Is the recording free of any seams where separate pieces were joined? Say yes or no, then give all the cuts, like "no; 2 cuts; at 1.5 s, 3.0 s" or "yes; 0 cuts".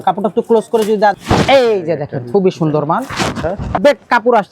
no; 2 cuts; at 1.1 s, 3.8 s